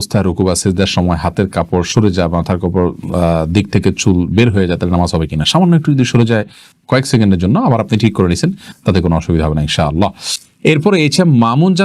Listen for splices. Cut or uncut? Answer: uncut